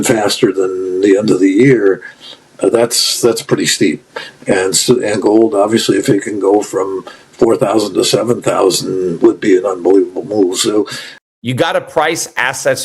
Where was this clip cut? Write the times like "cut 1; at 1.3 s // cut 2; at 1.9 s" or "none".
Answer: cut 1; at 11.0 s